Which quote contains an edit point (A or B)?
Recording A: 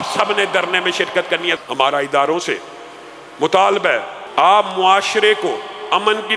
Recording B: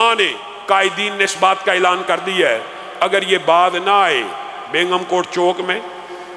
A